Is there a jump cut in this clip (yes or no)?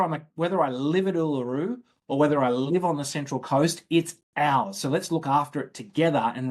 no